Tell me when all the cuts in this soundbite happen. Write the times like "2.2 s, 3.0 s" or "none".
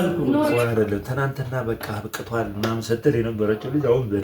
none